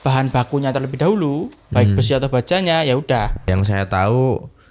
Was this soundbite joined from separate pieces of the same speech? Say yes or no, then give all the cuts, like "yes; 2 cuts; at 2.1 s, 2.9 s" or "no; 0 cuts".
yes; 1 cut; at 3.5 s